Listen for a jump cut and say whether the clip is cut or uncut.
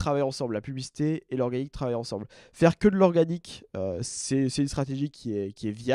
uncut